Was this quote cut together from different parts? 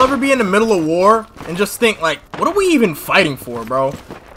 no; 0 cuts

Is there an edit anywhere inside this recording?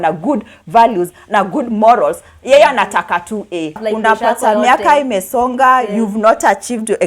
yes; 1 cut; at 3.8 s

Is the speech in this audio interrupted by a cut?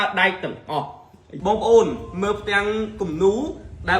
yes; 1 cut; at 1.3 s

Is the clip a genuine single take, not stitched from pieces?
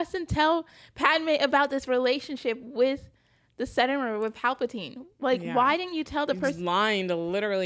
yes; 0 cuts

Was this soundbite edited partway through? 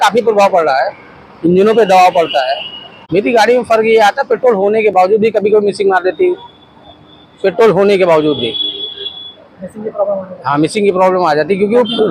no; 0 cuts

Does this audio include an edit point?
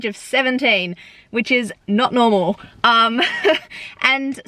no; 0 cuts

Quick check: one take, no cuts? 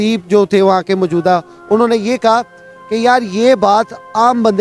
yes; 0 cuts

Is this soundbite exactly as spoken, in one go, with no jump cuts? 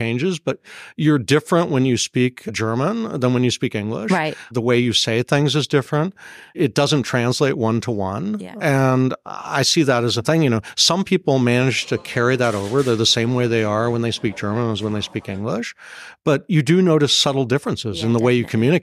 no; 1 cut; at 6.5 s

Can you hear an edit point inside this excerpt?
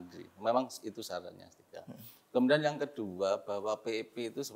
no; 0 cuts

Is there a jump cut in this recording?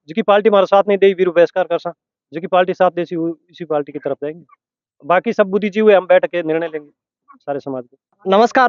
no; 0 cuts

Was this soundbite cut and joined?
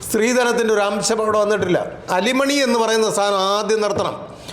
yes; 1 cut; at 2.1 s

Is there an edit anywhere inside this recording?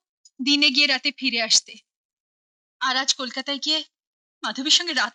no; 0 cuts

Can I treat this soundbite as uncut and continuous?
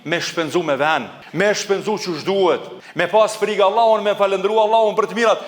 no; 2 cuts; at 1.2 s, 2.8 s

